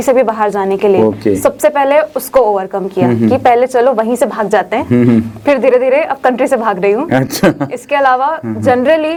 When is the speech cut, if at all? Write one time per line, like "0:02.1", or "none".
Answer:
none